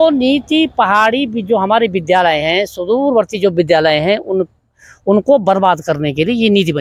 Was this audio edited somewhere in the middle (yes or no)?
no